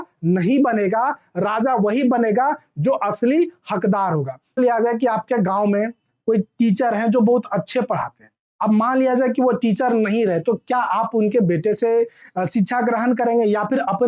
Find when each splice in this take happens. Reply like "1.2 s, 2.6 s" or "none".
4.5 s